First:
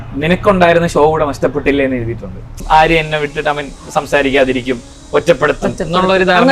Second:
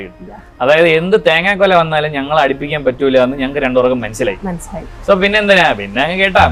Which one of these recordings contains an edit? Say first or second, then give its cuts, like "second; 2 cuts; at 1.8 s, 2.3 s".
first; 1 cut; at 2.6 s